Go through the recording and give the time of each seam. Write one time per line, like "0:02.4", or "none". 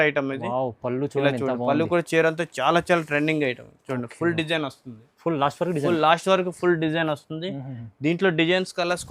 none